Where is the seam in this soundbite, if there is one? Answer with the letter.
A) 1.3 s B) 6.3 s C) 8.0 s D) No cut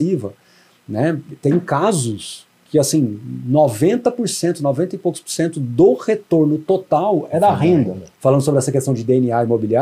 C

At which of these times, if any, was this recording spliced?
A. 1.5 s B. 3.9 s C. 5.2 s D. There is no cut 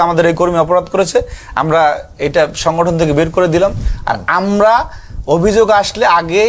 B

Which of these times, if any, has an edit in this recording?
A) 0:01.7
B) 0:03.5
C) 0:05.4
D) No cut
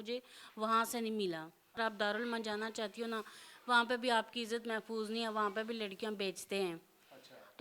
A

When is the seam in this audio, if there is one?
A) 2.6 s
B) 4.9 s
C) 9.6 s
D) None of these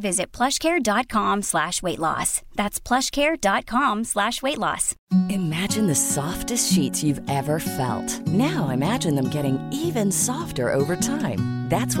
B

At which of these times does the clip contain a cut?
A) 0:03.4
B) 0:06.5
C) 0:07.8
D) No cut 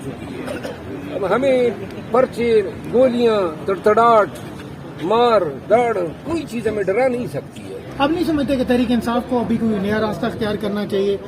C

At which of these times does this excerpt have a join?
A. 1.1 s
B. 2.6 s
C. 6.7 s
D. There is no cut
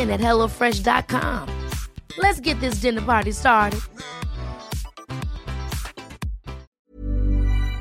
C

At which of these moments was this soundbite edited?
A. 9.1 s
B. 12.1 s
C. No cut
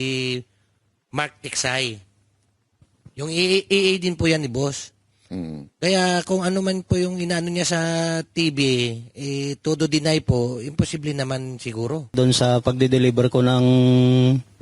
B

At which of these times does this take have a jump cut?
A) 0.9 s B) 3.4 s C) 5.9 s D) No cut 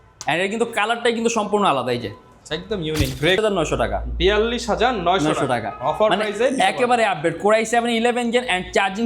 B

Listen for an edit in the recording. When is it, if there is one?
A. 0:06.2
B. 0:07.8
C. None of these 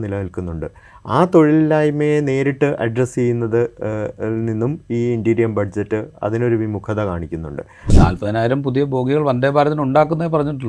B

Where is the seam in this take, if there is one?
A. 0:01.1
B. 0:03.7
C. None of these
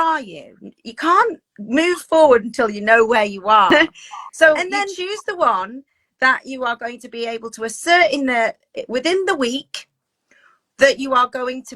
B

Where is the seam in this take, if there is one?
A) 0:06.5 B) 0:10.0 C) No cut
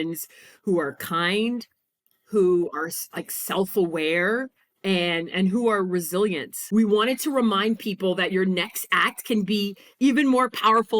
A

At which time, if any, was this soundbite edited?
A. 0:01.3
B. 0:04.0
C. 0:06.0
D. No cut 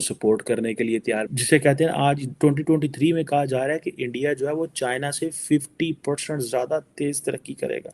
A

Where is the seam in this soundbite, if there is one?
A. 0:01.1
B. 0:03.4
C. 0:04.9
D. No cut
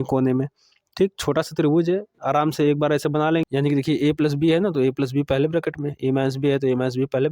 B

